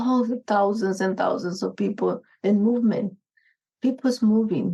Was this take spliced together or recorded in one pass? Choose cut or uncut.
uncut